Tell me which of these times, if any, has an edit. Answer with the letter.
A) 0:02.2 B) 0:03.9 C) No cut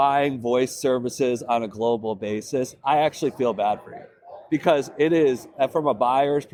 C